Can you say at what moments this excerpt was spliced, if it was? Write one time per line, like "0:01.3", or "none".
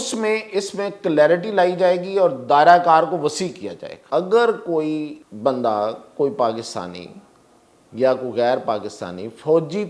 0:03.9
0:05.2

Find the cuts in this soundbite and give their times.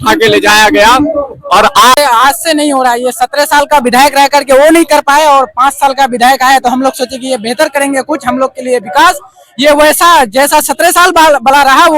0:02.0

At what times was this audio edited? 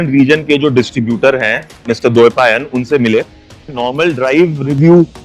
0:03.8

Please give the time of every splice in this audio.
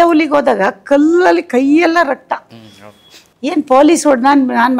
none

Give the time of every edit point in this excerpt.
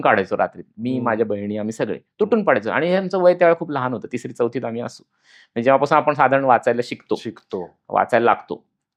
none

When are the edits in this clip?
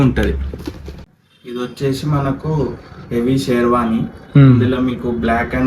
0:01.1

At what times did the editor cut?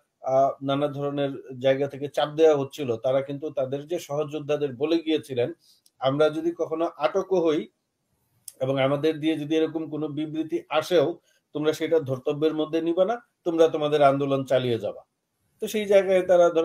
none

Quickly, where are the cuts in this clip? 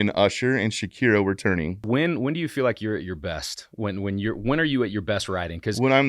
0:01.8

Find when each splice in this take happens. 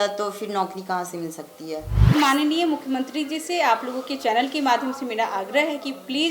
0:02.1

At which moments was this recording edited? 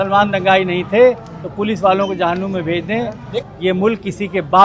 0:03.4

